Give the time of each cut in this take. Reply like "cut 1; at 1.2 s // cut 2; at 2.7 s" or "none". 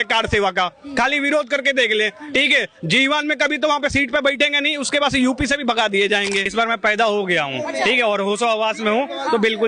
cut 1; at 6.5 s